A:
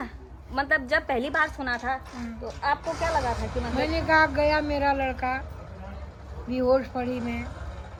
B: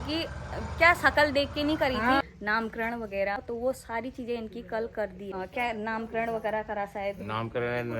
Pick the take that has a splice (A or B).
B